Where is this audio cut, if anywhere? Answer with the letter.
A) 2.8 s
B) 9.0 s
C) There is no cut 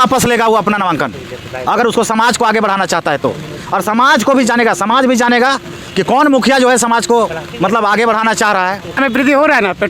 B